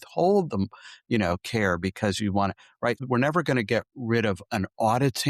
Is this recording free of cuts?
no; 1 cut; at 3.0 s

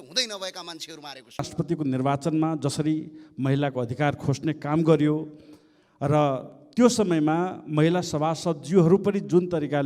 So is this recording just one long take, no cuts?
no; 1 cut; at 1.5 s

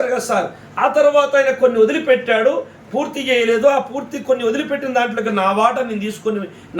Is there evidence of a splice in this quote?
no; 0 cuts

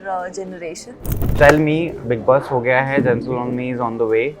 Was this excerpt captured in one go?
no; 1 cut; at 1.2 s

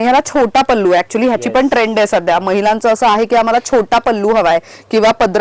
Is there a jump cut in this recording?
no; 0 cuts

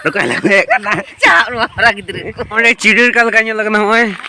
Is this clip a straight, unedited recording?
no; 1 cut; at 2.4 s

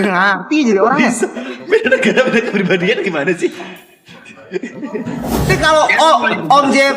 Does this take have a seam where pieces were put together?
yes; 1 cut; at 5.5 s

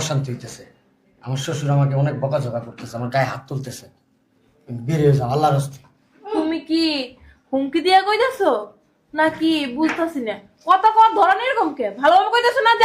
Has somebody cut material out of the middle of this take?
no; 0 cuts

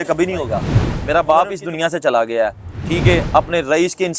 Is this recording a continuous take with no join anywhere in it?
no; 1 cut; at 1.0 s

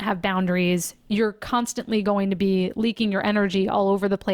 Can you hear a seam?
no; 0 cuts

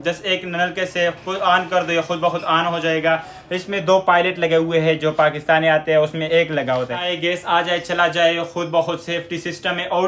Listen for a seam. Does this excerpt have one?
yes; 1 cut; at 7.0 s

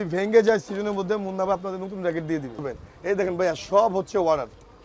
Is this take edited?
yes; 1 cut; at 2.6 s

